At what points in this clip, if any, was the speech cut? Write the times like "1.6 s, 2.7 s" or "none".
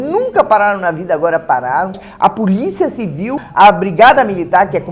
2.1 s, 3.4 s